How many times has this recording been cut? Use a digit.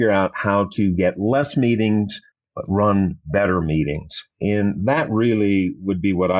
0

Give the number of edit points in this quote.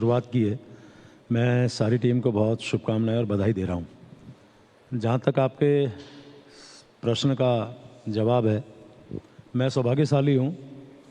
1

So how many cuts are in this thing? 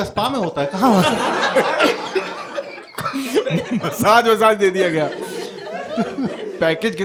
0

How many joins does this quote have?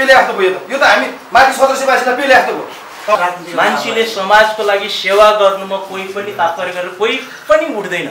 1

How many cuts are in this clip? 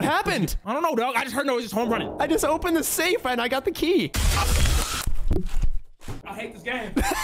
2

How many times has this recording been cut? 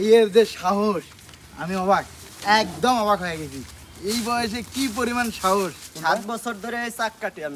0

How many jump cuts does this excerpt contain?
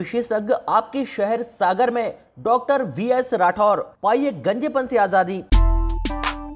1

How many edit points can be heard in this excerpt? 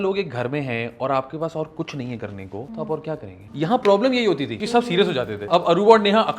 4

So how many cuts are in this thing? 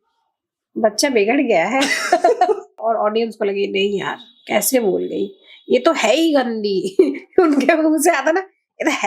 1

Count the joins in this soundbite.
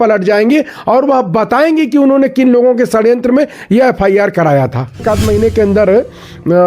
1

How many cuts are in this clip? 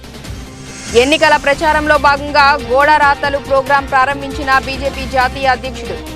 1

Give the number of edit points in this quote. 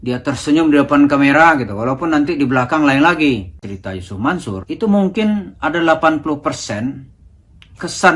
1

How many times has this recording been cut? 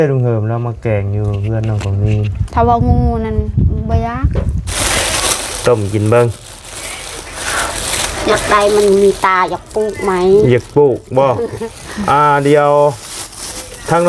1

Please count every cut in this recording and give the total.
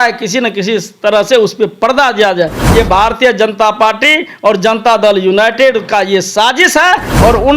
1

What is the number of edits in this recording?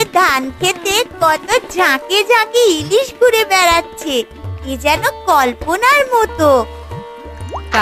0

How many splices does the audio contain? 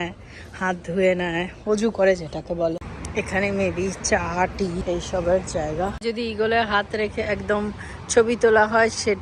3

